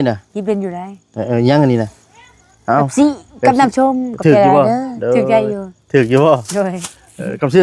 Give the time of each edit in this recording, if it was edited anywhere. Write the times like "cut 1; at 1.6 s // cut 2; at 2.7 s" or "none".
none